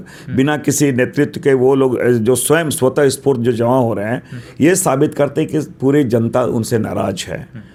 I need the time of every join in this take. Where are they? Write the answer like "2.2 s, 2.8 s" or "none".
none